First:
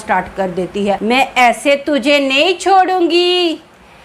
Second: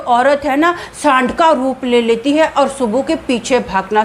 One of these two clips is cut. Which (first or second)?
first